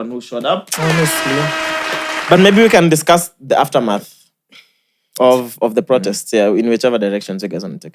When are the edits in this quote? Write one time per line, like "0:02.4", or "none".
none